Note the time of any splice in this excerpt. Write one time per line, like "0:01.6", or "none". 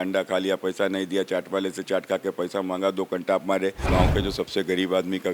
0:03.8